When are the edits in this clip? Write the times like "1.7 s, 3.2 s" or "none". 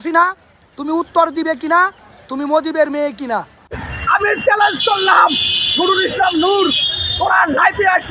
3.9 s